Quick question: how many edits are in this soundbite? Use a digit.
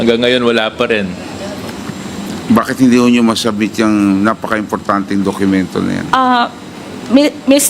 1